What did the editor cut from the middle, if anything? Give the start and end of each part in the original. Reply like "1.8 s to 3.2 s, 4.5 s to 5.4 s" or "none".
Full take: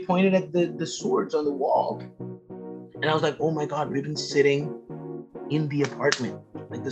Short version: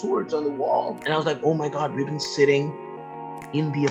2.0 s to 2.9 s